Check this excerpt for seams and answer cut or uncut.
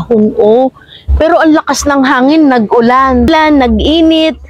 cut